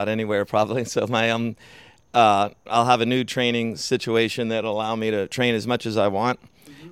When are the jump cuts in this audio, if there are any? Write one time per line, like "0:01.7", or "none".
none